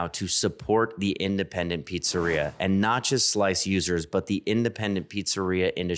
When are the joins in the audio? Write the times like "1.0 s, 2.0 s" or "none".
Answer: none

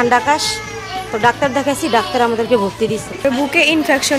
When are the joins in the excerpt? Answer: 3.1 s

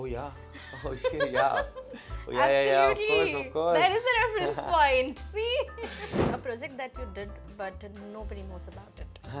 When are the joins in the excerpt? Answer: 6.2 s

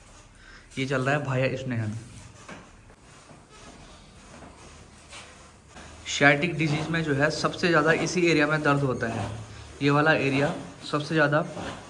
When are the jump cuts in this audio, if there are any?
3.0 s, 5.7 s

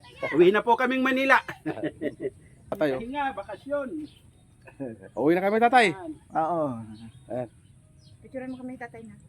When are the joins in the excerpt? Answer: 2.7 s

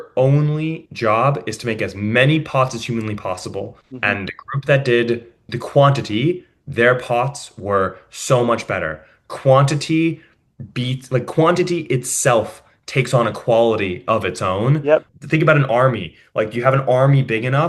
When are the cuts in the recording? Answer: 3.8 s, 5.5 s, 15.2 s

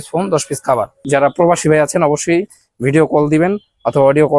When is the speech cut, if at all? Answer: 1.0 s

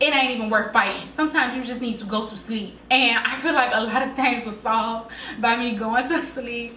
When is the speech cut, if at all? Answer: none

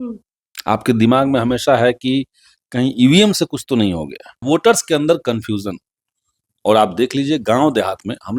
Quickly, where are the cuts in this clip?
4.5 s

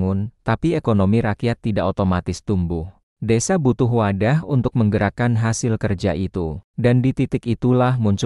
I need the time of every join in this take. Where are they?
6.6 s

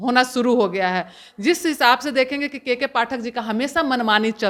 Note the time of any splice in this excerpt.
none

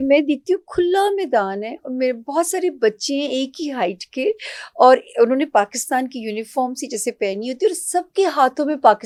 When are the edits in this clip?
none

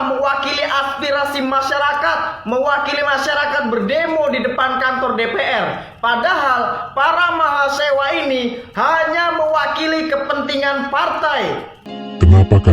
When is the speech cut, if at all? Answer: 11.7 s

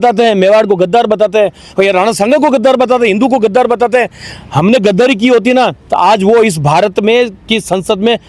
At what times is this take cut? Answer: none

